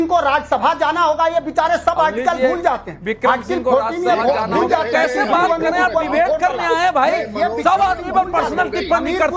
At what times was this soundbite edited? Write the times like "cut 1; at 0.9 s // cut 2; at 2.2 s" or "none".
none

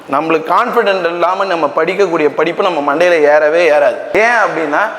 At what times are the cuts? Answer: cut 1; at 4.1 s

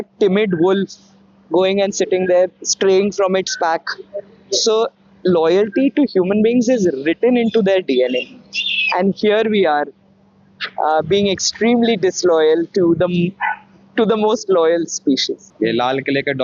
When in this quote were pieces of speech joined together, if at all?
cut 1; at 15.4 s

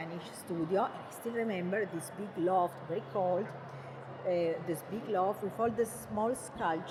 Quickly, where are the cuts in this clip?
none

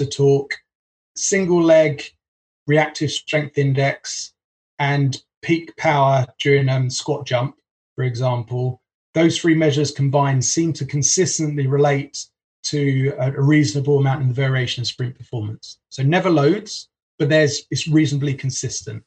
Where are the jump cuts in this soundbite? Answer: cut 1; at 1.0 s

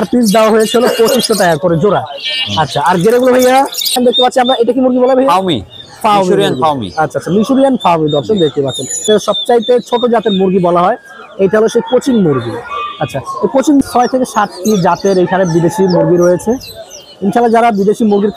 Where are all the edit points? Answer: cut 1; at 4.0 s // cut 2; at 9.1 s // cut 3; at 13.8 s

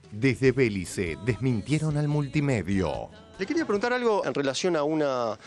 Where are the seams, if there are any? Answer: cut 1; at 3.3 s

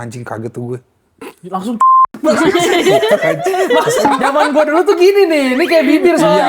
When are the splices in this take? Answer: cut 1; at 4.0 s

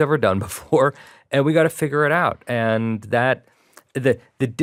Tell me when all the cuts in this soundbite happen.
none

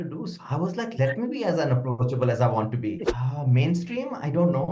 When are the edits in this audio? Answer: cut 1; at 3.0 s

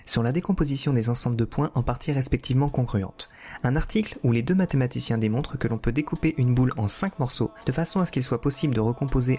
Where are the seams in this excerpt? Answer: none

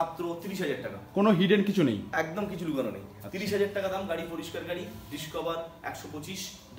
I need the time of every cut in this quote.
none

